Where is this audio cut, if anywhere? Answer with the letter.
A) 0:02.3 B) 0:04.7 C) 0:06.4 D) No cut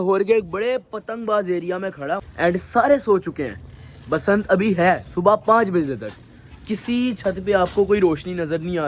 A